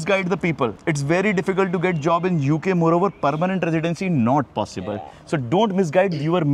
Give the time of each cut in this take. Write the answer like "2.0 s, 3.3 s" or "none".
none

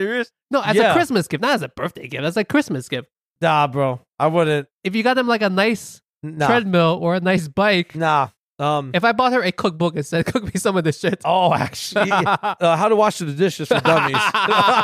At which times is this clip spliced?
3.0 s, 8.4 s, 12.6 s

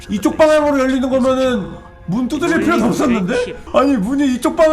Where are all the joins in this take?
3.6 s

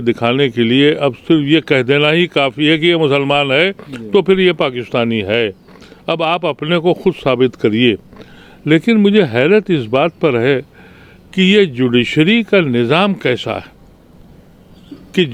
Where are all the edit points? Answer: none

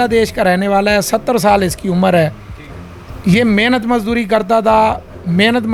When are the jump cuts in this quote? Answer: none

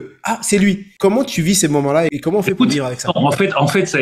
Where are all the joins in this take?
0.9 s, 2.1 s

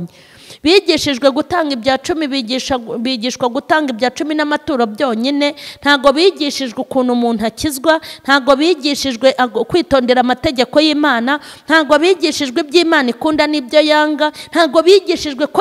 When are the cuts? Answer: none

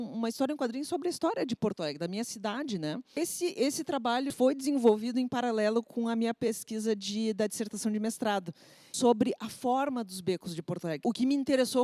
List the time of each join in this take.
3.2 s, 4.3 s, 8.9 s, 11.0 s

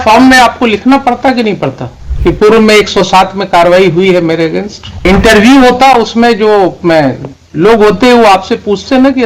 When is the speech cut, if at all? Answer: 4.8 s

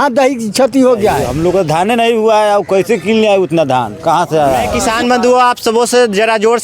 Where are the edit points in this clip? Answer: 1.3 s, 4.7 s

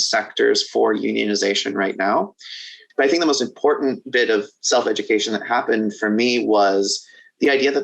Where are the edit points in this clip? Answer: 2.8 s

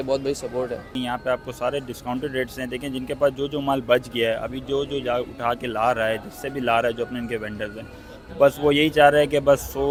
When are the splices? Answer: none

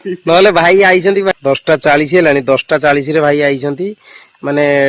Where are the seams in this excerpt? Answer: 1.3 s

